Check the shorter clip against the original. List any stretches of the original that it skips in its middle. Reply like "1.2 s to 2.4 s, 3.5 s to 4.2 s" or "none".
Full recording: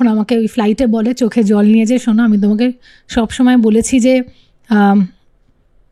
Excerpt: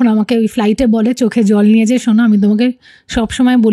none